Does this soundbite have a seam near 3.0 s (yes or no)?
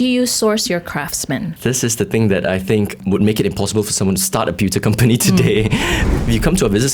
yes